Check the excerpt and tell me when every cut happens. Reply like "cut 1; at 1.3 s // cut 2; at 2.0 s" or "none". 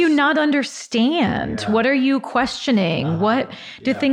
none